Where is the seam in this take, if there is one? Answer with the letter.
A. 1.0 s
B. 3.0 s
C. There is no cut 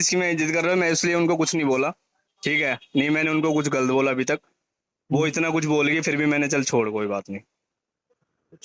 C